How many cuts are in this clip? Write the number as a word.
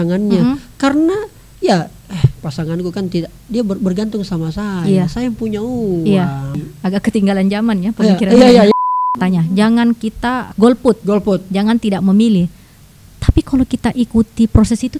three